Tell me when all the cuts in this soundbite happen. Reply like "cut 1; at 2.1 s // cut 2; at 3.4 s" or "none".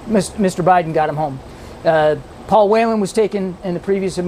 none